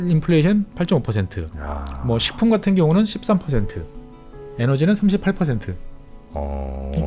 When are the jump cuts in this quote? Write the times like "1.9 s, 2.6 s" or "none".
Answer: none